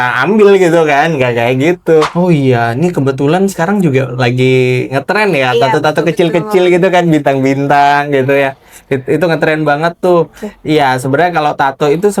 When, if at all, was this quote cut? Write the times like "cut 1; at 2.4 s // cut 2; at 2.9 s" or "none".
cut 1; at 2.1 s